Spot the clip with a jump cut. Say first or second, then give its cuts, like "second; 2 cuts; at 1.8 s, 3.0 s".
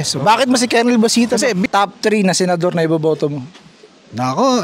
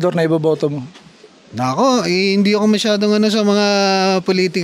first; 1 cut; at 1.6 s